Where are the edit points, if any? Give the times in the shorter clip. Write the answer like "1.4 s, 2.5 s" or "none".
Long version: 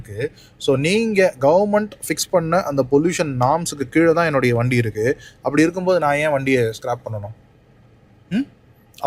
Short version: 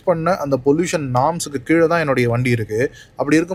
none